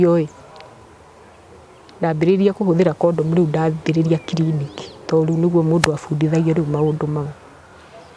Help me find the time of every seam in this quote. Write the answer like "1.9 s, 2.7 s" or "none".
none